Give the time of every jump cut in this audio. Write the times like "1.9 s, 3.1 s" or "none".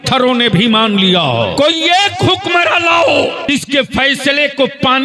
1.5 s, 3.5 s

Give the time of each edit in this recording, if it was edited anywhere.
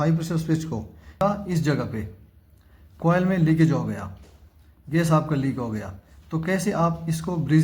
1.2 s

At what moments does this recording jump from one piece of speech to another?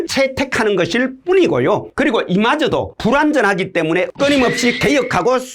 4.1 s

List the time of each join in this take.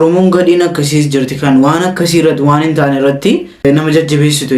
3.6 s

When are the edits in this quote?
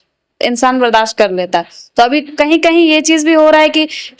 none

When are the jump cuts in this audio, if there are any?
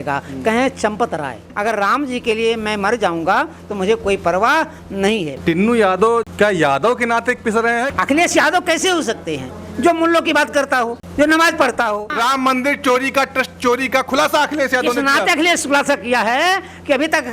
1.4 s, 5.3 s, 6.3 s, 7.9 s, 12.1 s

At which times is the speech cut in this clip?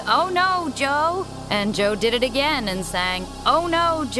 1.3 s, 3.2 s

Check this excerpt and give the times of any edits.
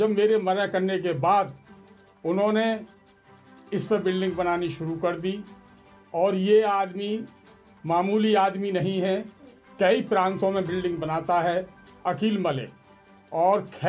none

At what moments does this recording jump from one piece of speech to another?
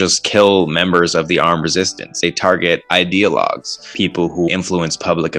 2.2 s, 4.3 s

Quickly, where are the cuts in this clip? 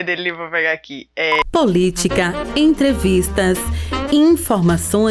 1.3 s

